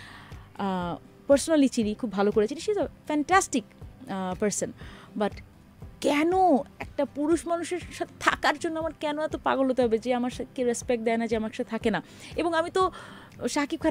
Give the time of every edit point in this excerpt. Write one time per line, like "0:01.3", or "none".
none